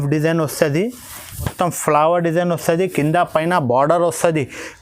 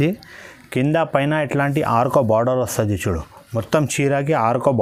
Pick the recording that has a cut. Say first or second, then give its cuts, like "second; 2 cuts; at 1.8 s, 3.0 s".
first; 1 cut; at 1.5 s